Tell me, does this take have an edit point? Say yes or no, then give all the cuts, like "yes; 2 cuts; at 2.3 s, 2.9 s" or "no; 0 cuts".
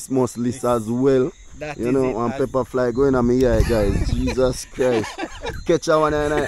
no; 0 cuts